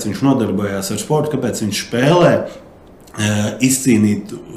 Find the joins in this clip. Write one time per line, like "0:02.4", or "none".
none